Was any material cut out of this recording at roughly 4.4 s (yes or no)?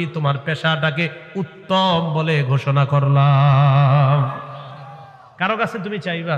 no